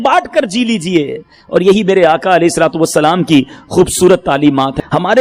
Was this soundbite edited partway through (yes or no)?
no